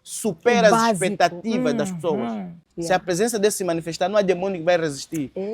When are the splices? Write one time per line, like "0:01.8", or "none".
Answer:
0:02.7